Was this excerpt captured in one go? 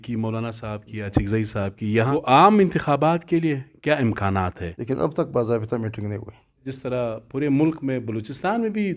no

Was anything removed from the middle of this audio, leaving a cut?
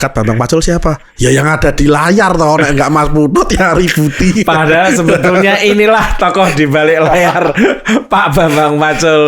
no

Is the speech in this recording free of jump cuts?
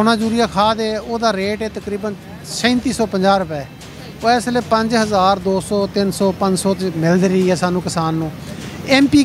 yes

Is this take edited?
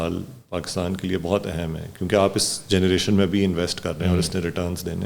no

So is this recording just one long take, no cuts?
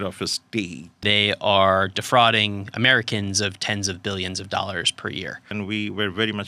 no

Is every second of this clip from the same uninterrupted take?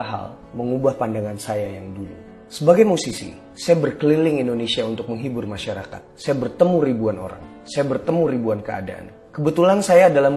yes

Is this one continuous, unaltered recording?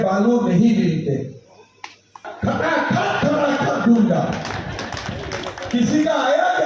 no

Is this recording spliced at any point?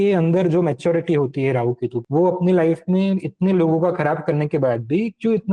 yes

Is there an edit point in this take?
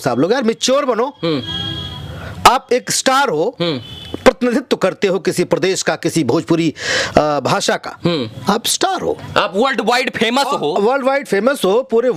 no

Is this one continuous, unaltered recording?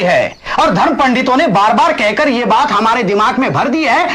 yes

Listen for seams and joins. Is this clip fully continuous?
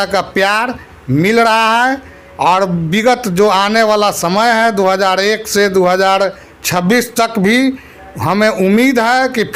yes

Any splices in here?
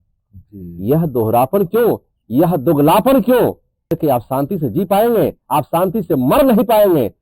yes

